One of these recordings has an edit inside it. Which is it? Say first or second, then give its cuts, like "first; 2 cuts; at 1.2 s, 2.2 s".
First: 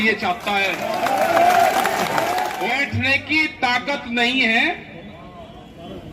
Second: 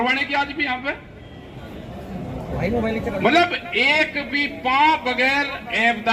first; 1 cut; at 2.5 s